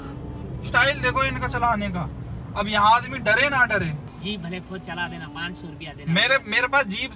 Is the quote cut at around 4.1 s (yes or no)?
yes